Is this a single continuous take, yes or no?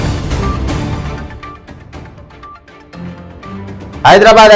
no